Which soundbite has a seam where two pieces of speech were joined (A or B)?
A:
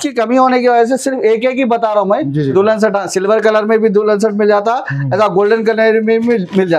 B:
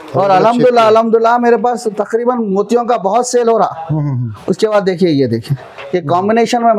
A